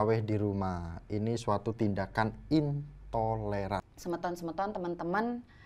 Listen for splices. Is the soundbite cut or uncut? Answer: cut